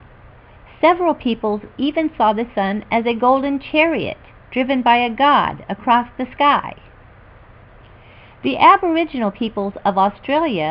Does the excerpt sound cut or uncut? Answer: cut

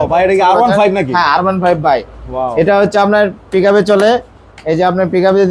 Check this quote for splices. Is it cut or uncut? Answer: uncut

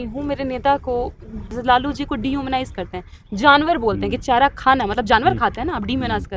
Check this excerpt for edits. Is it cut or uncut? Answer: cut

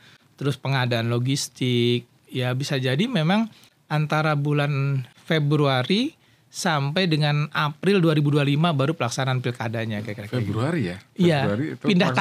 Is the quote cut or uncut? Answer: cut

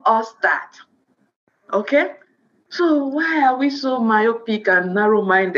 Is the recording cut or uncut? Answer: uncut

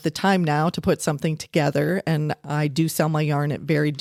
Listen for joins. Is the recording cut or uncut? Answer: uncut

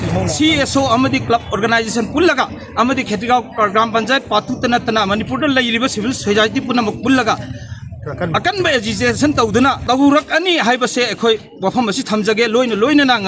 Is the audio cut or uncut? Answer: cut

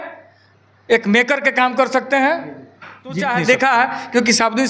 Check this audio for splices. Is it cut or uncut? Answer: cut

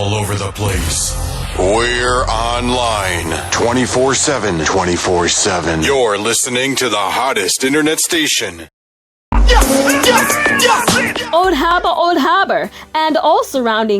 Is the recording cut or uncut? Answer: cut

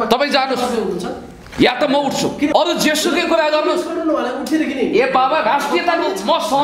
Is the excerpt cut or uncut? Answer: cut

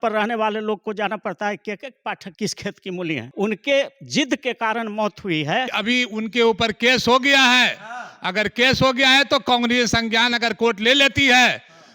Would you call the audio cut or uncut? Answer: cut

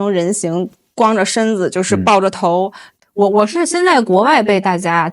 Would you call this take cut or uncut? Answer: cut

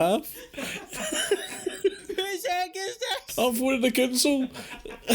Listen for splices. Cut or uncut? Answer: cut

